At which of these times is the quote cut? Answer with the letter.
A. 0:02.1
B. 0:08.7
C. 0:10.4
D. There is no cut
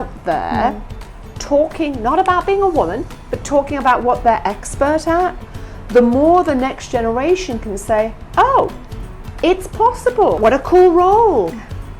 C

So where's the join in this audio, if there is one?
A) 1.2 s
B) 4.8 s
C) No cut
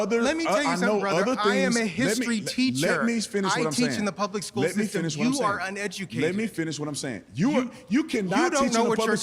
A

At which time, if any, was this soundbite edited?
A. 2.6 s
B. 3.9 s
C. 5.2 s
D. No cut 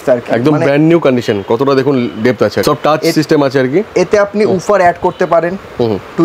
A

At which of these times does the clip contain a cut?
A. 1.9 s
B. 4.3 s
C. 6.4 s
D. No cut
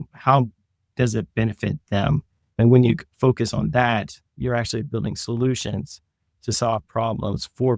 B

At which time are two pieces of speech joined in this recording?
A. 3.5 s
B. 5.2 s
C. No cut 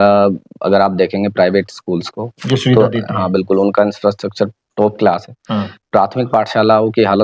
C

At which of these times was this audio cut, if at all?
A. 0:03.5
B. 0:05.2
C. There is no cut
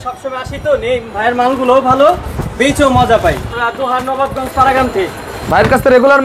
A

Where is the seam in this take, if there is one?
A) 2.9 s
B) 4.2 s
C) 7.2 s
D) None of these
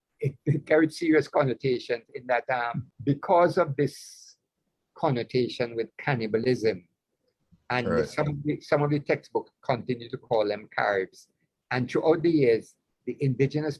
A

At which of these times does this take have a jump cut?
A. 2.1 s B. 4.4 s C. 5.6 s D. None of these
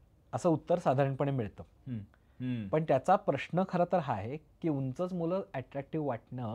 D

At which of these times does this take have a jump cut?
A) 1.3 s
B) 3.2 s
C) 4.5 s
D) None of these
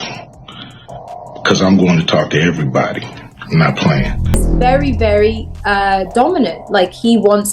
C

